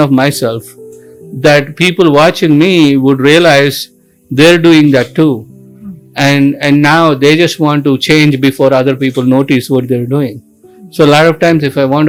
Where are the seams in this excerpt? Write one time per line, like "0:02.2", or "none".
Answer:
none